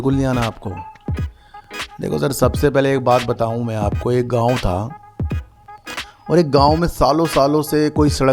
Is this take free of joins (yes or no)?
yes